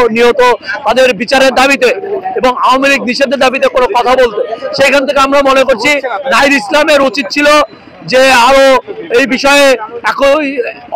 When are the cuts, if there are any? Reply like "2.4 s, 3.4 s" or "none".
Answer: none

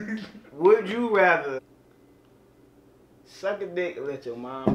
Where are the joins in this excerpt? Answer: 1.6 s

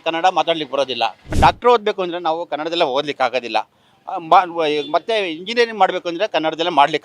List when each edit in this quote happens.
1.3 s

